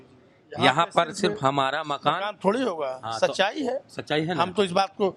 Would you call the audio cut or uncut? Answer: uncut